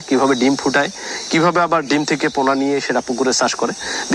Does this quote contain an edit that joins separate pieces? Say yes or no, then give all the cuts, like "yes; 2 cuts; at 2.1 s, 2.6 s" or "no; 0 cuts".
no; 0 cuts